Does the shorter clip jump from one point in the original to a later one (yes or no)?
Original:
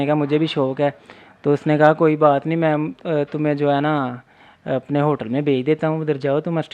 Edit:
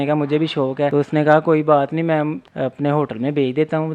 yes